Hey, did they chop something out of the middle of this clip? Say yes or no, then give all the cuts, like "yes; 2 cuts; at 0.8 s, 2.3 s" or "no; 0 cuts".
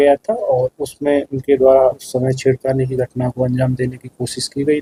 no; 0 cuts